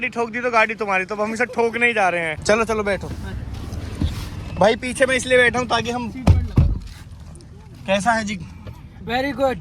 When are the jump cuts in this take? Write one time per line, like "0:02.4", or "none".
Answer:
none